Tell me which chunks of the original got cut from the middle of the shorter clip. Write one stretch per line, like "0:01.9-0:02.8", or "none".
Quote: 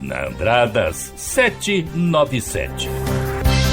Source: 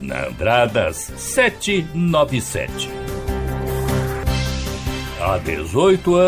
0:02.8-0:03.6